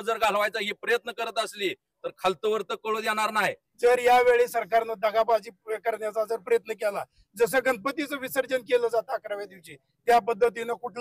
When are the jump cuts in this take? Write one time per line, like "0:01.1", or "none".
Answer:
0:03.6